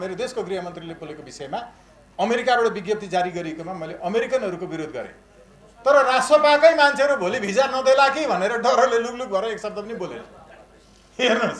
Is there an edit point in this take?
no; 0 cuts

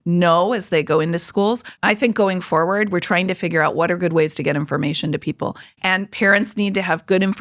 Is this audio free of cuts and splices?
no; 2 cuts; at 1.7 s, 5.7 s

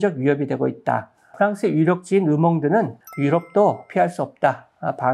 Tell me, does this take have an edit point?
yes; 2 cuts; at 1.3 s, 3.0 s

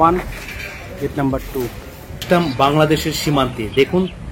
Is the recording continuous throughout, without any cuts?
no; 1 cut; at 2.2 s

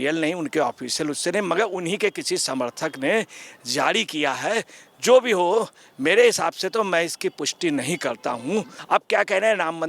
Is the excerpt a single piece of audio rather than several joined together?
no; 1 cut; at 8.8 s

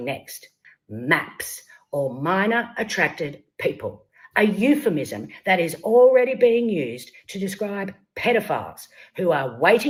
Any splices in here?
no; 0 cuts

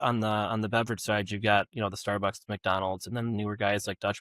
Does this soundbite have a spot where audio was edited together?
no; 0 cuts

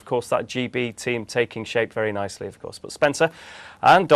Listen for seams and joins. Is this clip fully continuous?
yes; 0 cuts

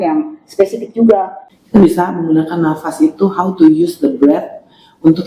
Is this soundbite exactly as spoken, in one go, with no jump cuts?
no; 1 cut; at 1.4 s

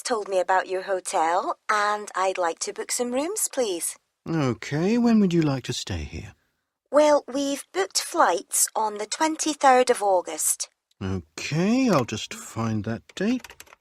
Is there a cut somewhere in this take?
no; 0 cuts

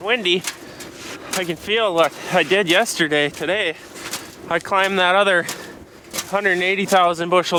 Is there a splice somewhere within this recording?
no; 0 cuts

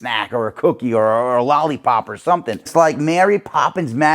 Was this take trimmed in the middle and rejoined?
yes; 1 cut; at 2.7 s

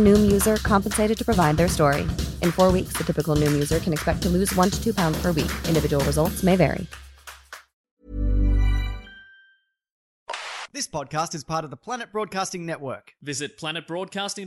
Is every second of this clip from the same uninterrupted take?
no; 1 cut; at 10.1 s

